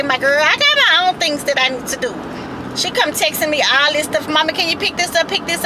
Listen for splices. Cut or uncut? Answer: uncut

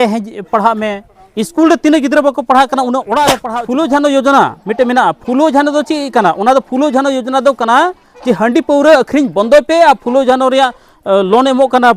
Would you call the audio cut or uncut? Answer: cut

